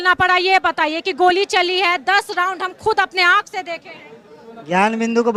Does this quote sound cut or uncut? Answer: uncut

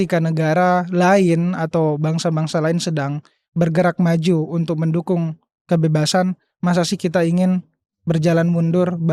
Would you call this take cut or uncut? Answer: uncut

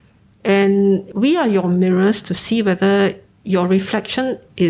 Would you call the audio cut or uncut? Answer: cut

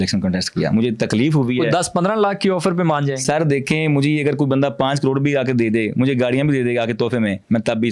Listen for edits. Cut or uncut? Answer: uncut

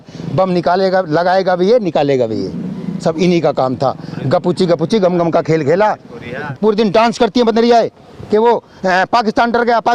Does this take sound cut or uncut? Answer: cut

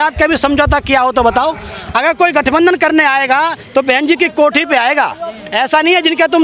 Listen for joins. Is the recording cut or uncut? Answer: uncut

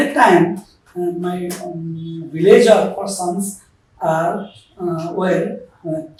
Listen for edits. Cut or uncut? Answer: uncut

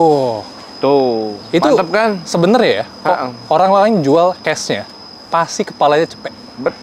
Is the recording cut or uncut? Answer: uncut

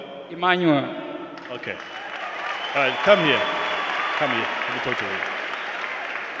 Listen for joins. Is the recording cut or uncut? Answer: uncut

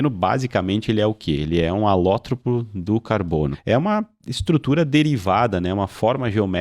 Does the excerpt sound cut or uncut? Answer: cut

